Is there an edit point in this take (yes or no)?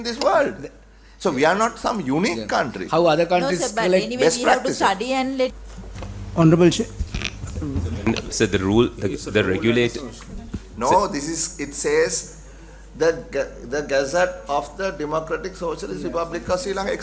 yes